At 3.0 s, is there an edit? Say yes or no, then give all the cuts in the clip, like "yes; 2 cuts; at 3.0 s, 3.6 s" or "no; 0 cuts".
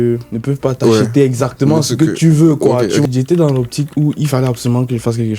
yes; 1 cut; at 3.0 s